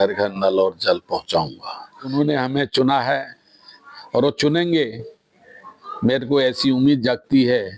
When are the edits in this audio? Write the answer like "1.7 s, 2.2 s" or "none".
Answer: 2.1 s